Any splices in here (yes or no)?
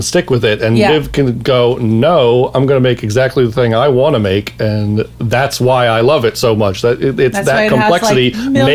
no